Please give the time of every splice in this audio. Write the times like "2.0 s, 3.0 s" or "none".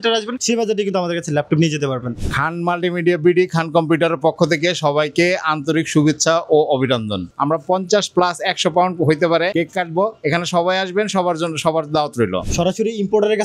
2.1 s, 7.3 s, 12.4 s